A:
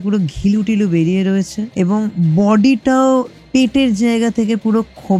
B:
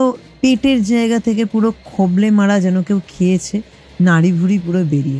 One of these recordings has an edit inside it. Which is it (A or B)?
A